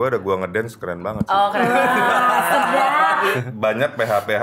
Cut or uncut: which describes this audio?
cut